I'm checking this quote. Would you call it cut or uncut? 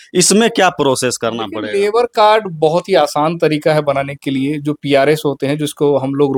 uncut